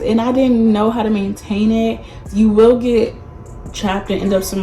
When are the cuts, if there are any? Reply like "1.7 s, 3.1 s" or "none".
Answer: 2.2 s